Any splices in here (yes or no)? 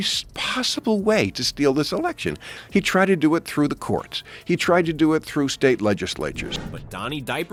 no